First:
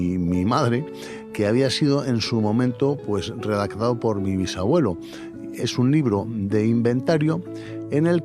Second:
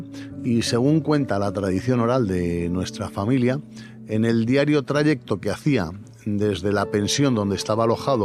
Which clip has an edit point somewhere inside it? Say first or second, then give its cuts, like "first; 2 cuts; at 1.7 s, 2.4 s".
first; 2 cuts; at 1.2 s, 5.6 s